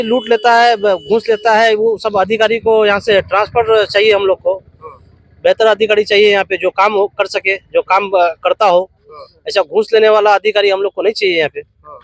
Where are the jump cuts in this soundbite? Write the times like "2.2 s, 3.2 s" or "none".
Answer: none